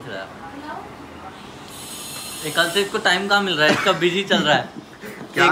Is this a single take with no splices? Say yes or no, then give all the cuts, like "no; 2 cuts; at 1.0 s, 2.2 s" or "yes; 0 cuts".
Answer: yes; 0 cuts